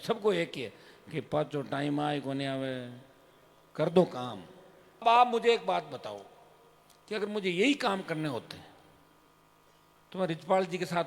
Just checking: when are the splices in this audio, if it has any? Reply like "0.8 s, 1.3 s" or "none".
5.0 s